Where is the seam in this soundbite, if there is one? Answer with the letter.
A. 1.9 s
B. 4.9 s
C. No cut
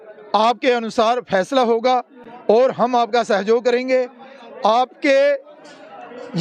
A